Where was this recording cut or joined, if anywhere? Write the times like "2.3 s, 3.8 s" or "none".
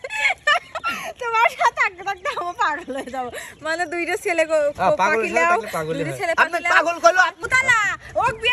7.3 s